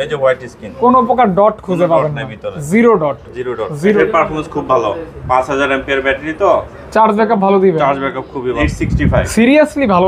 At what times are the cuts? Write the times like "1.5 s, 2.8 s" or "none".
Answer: 4.0 s, 8.7 s